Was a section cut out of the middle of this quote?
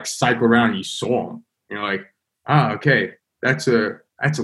no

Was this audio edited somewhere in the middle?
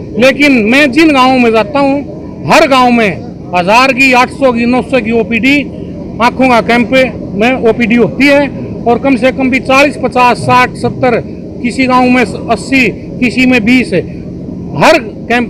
no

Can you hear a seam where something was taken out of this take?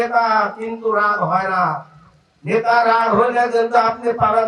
no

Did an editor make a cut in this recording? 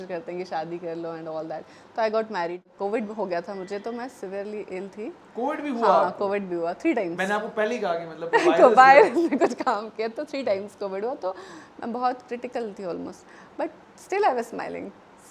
yes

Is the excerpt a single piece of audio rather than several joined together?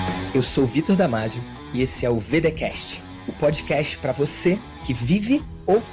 yes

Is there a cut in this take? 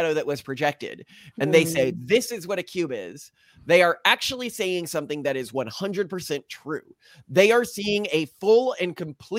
no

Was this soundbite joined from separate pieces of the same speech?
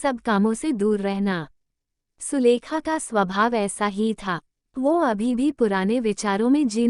yes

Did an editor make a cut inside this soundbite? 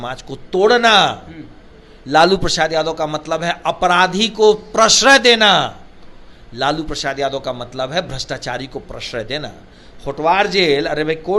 no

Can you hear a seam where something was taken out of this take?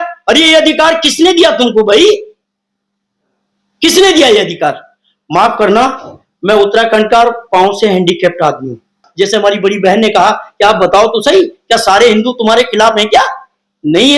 yes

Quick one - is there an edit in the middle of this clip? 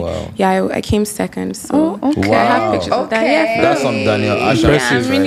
no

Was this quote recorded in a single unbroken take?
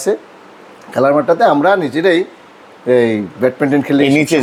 yes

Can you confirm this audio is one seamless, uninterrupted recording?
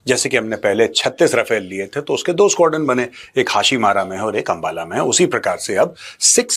yes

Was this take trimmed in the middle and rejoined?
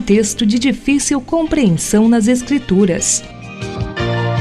yes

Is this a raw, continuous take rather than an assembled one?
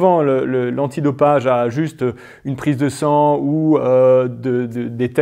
yes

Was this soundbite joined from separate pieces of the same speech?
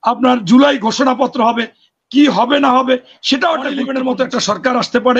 yes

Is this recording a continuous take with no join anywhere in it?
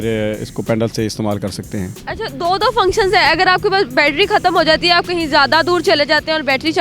yes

